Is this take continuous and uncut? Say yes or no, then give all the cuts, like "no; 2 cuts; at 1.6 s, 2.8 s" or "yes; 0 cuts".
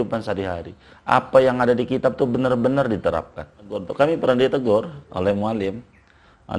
no; 1 cut; at 3.9 s